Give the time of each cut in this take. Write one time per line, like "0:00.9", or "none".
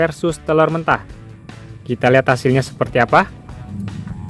none